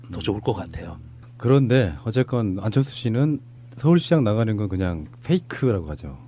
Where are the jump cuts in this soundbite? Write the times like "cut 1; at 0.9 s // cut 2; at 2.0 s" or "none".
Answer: cut 1; at 3.8 s